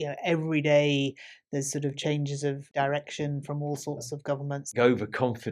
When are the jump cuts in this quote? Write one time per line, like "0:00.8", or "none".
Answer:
0:02.7
0:04.7